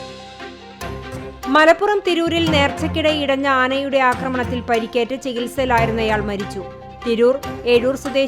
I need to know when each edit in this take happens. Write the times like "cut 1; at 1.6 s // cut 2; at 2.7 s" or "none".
cut 1; at 1.3 s